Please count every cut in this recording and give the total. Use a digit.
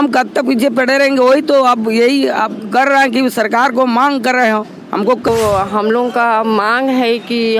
1